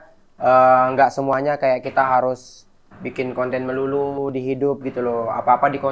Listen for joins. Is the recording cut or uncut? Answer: uncut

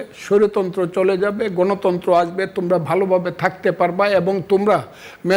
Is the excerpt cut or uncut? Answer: uncut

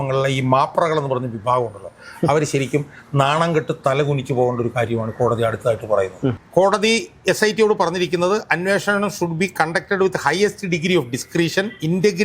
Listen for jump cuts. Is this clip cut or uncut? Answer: cut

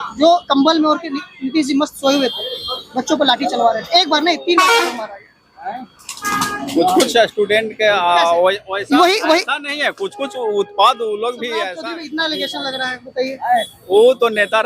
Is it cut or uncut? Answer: cut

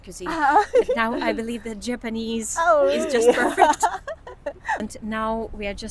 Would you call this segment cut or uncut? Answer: cut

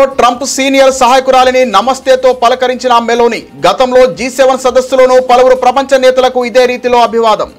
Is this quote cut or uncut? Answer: uncut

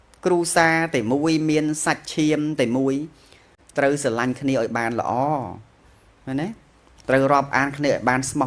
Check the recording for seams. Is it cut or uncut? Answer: uncut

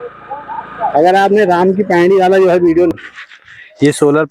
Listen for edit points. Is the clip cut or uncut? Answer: cut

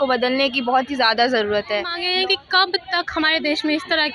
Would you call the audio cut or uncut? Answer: cut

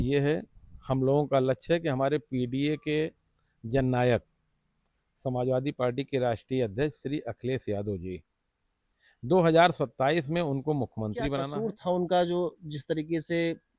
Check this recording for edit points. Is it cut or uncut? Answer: cut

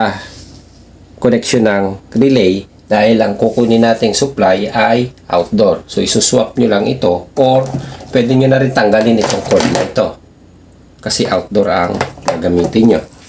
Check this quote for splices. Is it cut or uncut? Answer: uncut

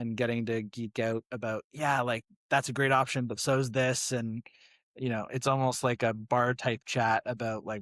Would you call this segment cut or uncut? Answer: uncut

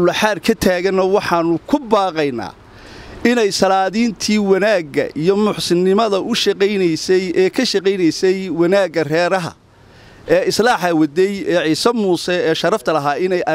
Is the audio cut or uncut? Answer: uncut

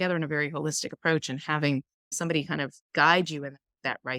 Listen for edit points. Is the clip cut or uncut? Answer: uncut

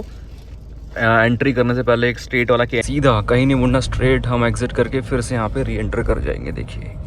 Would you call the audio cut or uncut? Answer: cut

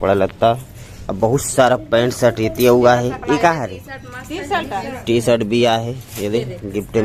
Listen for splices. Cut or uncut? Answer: uncut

